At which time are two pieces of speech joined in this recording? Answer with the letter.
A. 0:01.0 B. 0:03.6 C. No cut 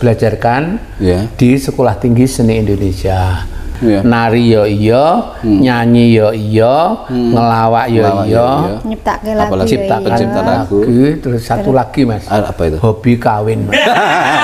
B